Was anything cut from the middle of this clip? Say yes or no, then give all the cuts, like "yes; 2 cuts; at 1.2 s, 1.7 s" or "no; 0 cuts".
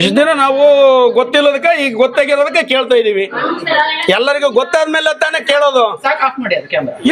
no; 0 cuts